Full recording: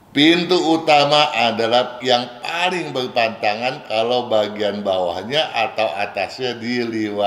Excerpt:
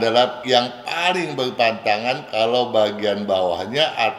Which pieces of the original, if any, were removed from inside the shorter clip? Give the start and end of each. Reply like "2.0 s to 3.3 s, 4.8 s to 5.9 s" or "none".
none